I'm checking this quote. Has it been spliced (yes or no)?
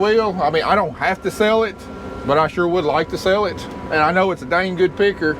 yes